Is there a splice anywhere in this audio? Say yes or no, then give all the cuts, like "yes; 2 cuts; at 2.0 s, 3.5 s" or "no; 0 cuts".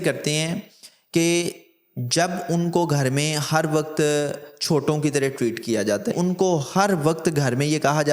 yes; 1 cut; at 6.1 s